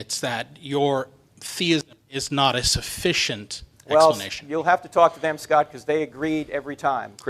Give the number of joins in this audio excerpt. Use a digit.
0